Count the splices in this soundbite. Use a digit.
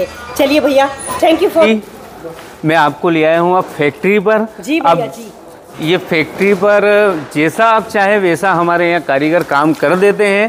1